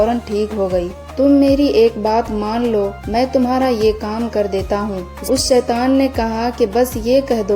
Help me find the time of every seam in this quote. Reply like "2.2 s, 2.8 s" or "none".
1.0 s, 5.1 s